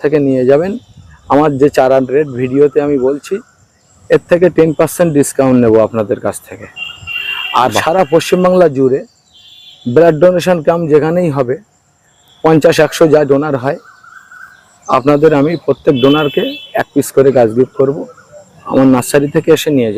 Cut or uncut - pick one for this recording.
uncut